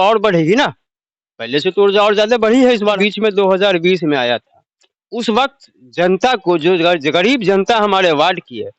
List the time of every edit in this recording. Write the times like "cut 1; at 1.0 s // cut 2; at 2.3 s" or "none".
cut 1; at 3.0 s